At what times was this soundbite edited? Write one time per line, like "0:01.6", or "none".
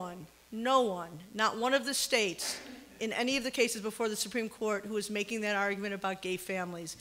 0:02.2